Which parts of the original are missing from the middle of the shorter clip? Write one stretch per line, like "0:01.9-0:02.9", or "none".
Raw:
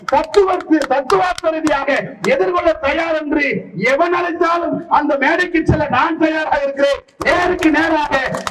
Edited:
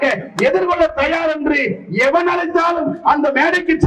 none

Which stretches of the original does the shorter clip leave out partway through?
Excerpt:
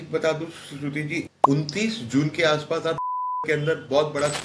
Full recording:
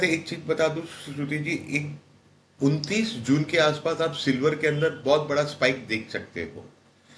0:01.6-0:02.4

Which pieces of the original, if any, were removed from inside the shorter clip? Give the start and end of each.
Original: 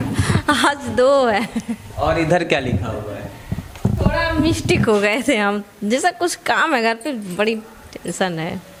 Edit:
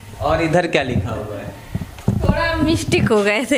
none

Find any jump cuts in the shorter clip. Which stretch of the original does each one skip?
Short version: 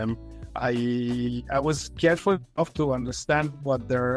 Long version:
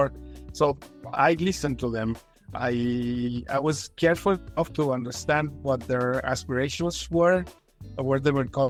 none

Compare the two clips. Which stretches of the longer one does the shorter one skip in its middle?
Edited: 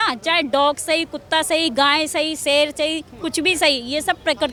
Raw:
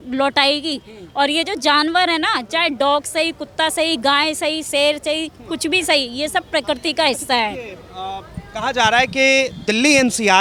none

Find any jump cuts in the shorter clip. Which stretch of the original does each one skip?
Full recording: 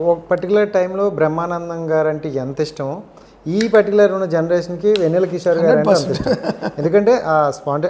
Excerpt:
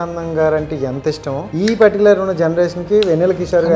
0:03.0-0:03.4

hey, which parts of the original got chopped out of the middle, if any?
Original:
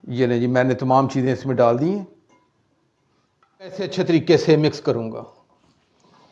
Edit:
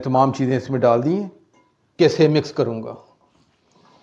0:02.7-0:04.2

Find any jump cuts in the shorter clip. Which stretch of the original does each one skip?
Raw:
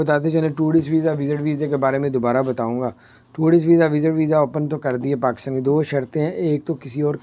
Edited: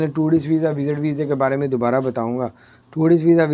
none

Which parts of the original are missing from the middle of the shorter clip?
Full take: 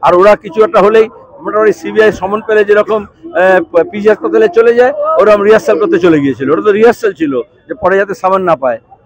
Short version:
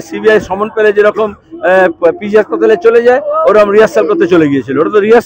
none

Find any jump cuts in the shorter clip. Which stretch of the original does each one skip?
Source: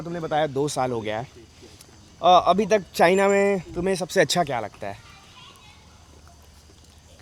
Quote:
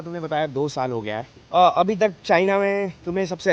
0:01.3-0:02.0

